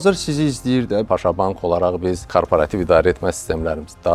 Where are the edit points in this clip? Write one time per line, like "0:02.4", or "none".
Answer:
0:01.1
0:02.3